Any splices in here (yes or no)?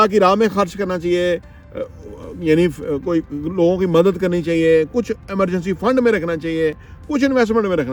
no